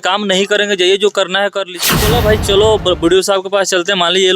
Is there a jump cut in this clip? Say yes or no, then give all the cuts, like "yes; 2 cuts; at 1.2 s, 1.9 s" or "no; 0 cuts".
yes; 1 cut; at 1.9 s